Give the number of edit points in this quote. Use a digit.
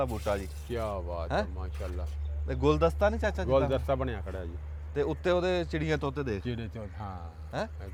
0